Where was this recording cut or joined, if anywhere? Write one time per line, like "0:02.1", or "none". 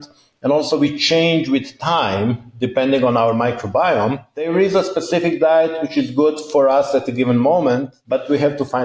0:04.5
0:07.9